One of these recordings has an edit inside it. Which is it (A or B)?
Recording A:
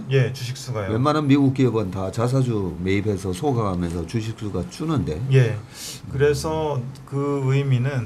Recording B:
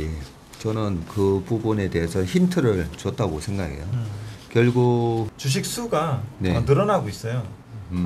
B